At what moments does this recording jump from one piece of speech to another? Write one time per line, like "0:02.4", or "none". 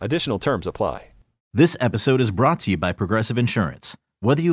0:01.3